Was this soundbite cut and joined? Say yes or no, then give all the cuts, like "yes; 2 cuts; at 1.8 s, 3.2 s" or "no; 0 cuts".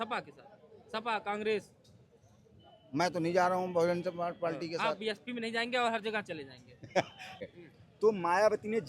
yes; 1 cut; at 7.4 s